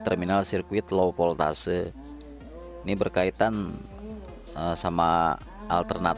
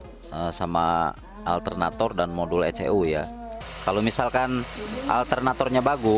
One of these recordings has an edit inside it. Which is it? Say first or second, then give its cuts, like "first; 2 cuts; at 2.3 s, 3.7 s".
second; 1 cut; at 3.7 s